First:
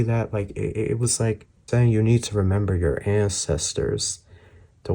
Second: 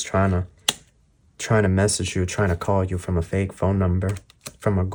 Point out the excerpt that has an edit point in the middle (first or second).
first